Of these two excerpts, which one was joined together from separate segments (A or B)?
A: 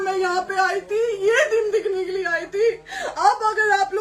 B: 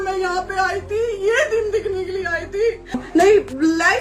B